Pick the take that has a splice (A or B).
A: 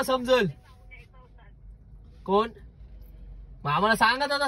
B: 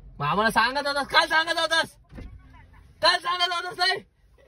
A